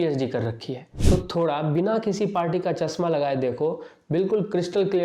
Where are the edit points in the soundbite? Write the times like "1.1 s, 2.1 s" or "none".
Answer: 0.9 s